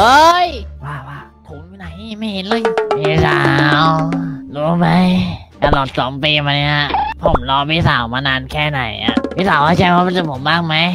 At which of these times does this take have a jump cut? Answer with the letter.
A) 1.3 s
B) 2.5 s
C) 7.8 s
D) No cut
B